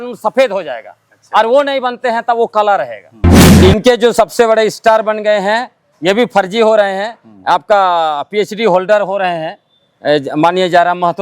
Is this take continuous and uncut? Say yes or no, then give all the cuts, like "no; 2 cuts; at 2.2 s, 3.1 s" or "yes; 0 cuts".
no; 1 cut; at 3.3 s